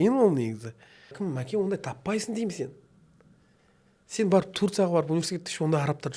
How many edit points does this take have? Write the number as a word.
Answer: one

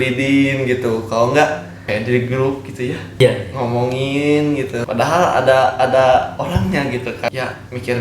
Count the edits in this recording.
four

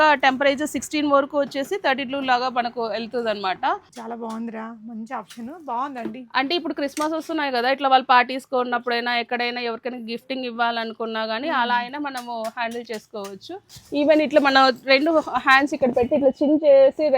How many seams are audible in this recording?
two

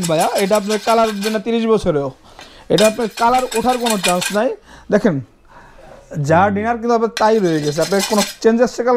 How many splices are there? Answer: zero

